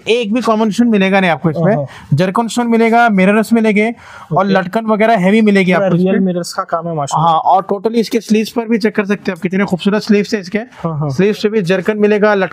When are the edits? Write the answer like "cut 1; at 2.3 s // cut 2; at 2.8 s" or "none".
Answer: none